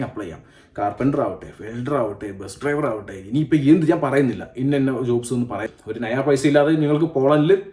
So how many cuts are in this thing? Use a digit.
1